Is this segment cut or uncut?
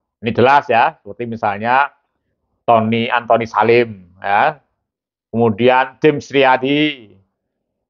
uncut